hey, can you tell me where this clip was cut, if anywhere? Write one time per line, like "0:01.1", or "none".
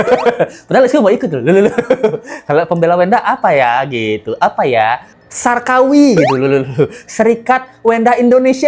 none